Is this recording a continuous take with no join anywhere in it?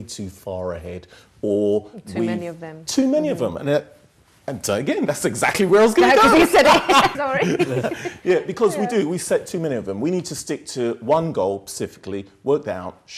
no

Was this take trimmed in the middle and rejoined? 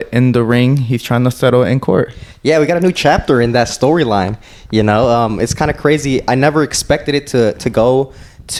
no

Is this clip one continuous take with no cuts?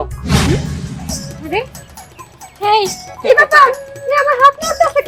yes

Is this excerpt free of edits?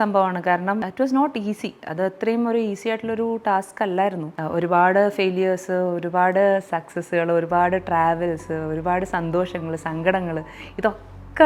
no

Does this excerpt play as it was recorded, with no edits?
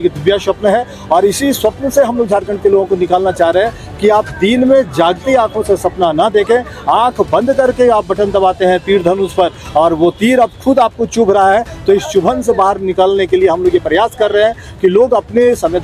yes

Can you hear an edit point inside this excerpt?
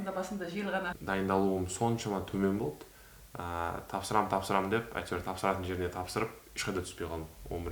yes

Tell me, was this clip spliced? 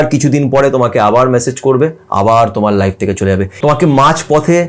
yes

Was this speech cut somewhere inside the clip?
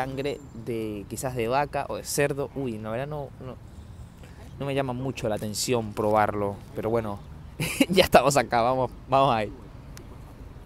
no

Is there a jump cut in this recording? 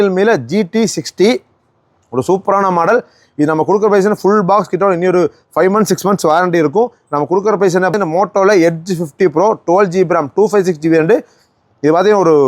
yes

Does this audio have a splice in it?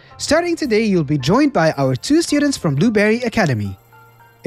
no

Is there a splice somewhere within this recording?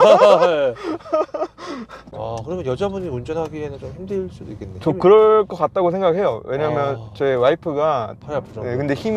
yes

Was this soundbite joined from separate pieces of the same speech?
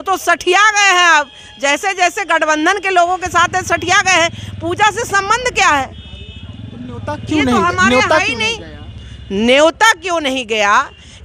no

